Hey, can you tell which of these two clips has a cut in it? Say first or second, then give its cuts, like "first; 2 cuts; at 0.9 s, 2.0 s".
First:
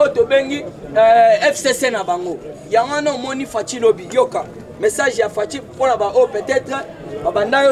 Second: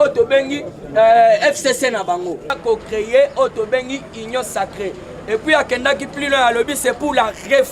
second; 1 cut; at 2.5 s